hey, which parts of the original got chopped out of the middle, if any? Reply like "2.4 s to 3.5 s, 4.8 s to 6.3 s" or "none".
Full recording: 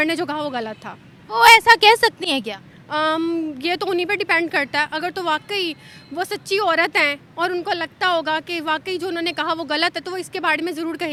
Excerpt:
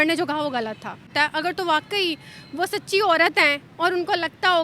1.1 s to 4.7 s